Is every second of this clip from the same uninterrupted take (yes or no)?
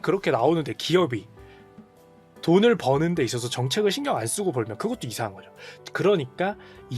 yes